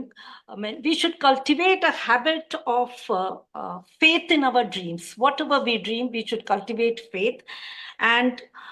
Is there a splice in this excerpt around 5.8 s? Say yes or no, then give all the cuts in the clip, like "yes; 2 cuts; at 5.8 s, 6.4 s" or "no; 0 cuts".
no; 0 cuts